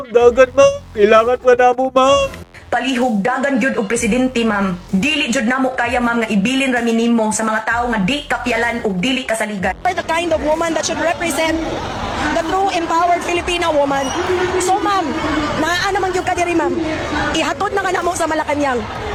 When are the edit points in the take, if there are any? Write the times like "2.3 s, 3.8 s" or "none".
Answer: none